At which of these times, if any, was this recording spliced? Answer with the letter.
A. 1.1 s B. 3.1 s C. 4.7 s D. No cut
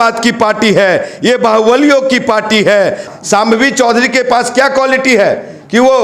B